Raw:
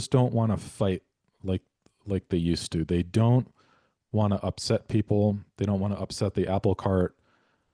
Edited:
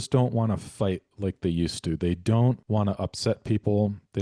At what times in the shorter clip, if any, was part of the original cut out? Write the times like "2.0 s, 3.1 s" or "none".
1.1 s, 2.6 s